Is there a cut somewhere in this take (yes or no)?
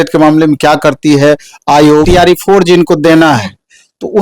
yes